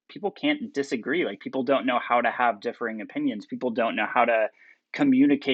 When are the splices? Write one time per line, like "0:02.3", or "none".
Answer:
none